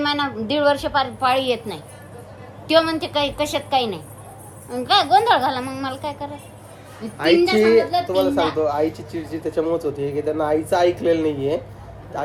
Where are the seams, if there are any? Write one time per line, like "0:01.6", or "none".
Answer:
none